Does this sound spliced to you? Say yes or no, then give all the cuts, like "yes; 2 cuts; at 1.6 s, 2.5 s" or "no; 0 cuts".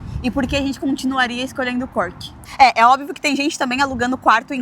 yes; 1 cut; at 2.3 s